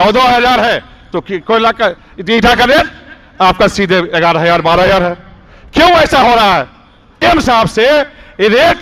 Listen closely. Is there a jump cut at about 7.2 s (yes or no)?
yes